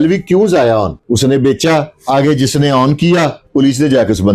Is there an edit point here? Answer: yes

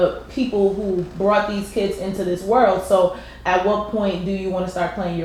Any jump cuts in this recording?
no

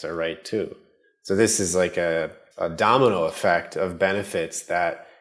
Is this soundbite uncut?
yes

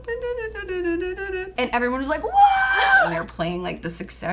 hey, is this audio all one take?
no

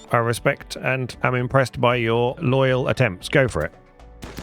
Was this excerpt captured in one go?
no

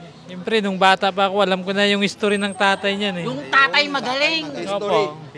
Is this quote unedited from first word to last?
yes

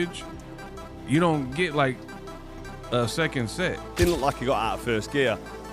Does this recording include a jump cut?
yes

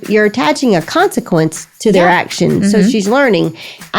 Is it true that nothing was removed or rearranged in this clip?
no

